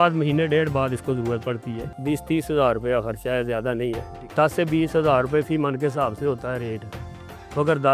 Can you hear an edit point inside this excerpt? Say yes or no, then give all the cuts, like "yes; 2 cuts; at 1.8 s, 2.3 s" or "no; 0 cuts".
yes; 2 cuts; at 1.9 s, 4.1 s